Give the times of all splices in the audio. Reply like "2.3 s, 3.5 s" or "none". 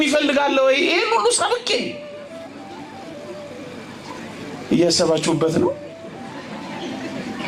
none